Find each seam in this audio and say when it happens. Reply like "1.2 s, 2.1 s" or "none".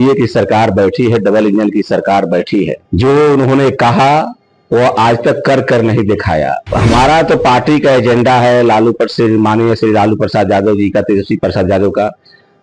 2.8 s, 6.6 s